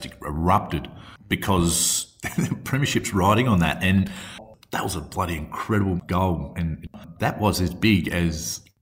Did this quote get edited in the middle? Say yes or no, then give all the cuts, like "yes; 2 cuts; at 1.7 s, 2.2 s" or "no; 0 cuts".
no; 0 cuts